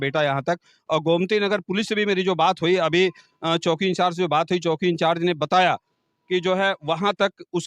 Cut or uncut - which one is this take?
uncut